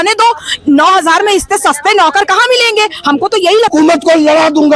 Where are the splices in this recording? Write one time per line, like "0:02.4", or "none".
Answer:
0:03.7